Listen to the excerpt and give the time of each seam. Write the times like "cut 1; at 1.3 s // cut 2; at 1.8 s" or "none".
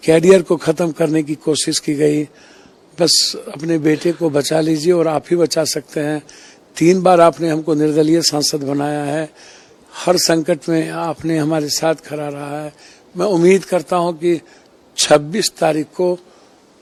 none